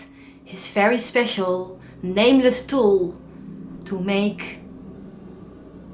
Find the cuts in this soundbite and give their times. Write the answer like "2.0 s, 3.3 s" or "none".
none

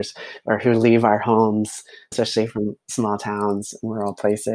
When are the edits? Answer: 2.1 s

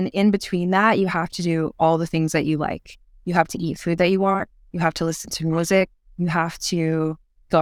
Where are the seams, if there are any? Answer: none

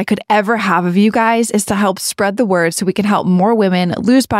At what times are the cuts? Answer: none

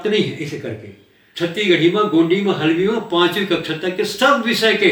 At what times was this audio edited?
1.1 s

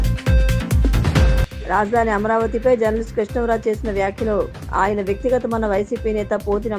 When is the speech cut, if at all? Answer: none

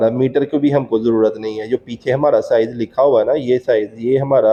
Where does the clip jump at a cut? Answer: none

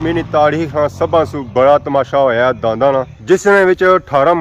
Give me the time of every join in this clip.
none

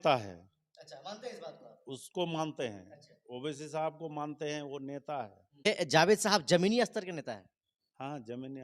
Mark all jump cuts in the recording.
5.7 s

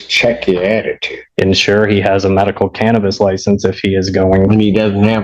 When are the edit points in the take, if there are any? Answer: 1.3 s

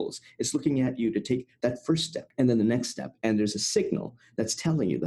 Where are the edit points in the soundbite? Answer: 2.2 s

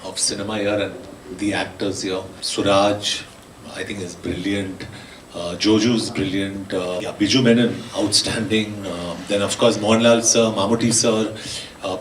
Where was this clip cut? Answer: 2.4 s, 7.1 s

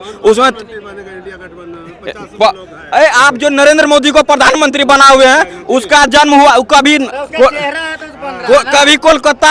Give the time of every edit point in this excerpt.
none

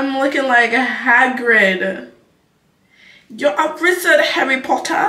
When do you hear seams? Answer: none

